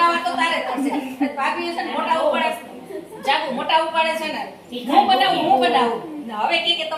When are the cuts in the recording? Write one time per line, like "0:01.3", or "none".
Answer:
none